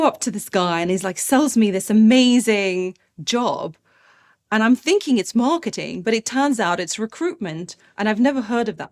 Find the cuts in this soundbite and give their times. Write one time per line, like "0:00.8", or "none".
none